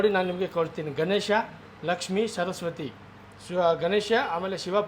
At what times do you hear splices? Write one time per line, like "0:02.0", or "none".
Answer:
none